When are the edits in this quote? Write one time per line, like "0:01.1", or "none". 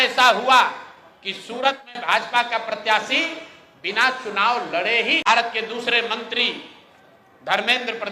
0:05.3